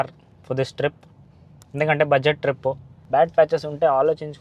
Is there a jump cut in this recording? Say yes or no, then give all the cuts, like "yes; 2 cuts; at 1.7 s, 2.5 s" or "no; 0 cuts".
yes; 1 cut; at 2.9 s